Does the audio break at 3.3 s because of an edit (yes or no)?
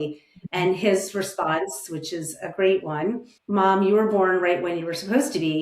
yes